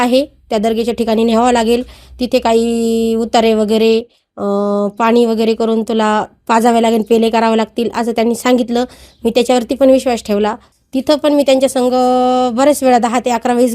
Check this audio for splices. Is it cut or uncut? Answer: cut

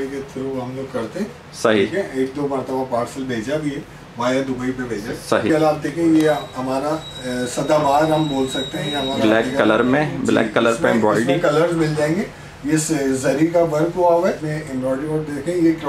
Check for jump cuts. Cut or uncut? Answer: cut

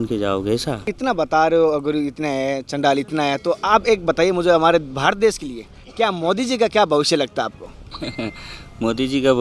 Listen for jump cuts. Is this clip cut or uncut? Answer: cut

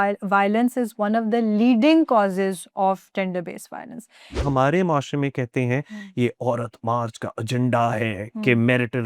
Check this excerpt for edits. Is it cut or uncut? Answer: cut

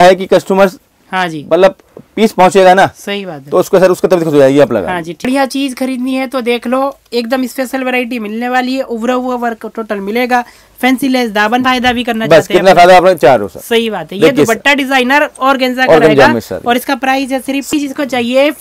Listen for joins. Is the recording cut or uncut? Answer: cut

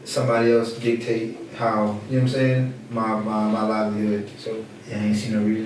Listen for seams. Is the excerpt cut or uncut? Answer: cut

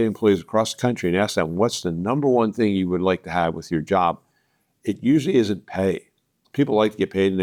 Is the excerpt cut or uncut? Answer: uncut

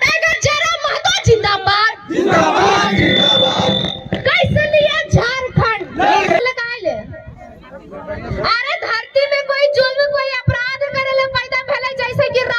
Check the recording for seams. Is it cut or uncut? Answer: cut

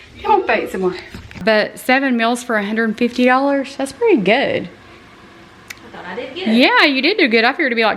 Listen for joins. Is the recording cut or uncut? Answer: cut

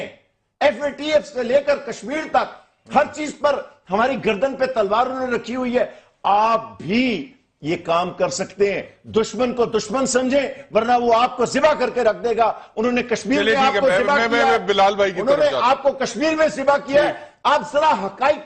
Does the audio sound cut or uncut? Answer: uncut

